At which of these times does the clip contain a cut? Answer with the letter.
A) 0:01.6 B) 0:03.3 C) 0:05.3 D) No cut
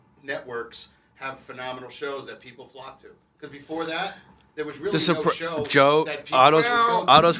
D